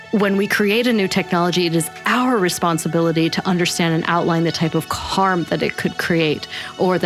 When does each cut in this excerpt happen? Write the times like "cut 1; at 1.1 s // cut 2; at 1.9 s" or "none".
none

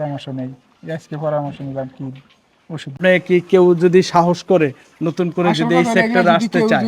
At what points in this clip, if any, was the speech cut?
cut 1; at 3.0 s

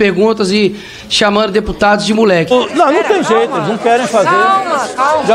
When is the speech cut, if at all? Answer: cut 1; at 2.5 s

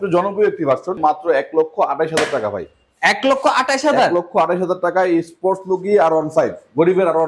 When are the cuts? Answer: cut 1; at 0.9 s

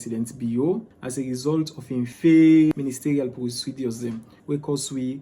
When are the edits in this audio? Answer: cut 1; at 1.0 s // cut 2; at 2.1 s // cut 3; at 2.7 s // cut 4; at 4.3 s

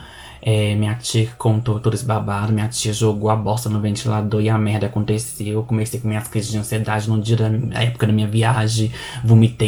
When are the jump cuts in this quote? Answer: none

